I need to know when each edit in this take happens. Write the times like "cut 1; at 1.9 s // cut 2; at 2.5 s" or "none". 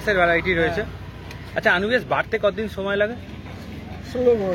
none